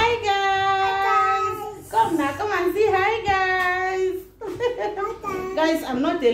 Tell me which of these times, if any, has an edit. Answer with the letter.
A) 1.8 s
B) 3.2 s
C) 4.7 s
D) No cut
D